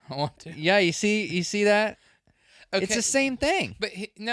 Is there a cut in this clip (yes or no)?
no